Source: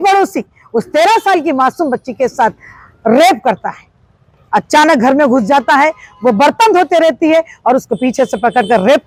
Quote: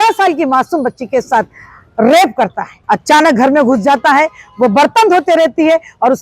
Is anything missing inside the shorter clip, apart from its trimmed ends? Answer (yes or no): yes